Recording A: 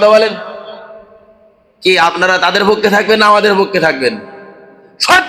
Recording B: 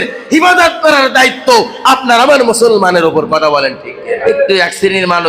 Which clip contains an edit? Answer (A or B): B